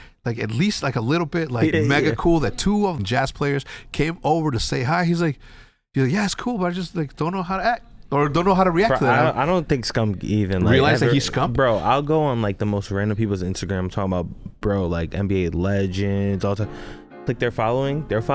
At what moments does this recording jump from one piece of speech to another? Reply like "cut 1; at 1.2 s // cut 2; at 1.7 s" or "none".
cut 1; at 1.7 s // cut 2; at 3.0 s